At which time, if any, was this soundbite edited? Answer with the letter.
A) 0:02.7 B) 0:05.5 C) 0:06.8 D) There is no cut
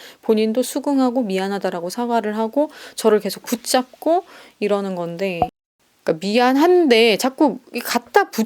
B